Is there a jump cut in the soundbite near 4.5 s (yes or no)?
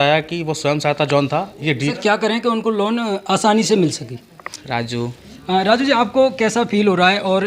yes